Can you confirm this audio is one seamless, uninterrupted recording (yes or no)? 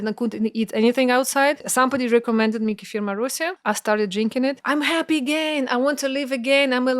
no